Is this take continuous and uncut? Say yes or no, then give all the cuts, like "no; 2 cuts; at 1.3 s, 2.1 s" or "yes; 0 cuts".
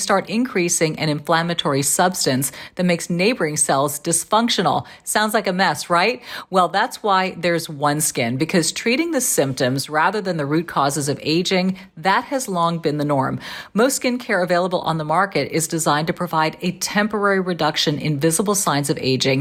yes; 0 cuts